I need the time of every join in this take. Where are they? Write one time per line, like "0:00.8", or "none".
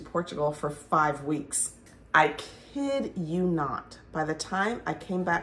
0:01.8